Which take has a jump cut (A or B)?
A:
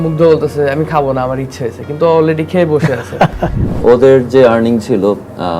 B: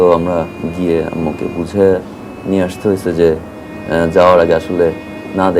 A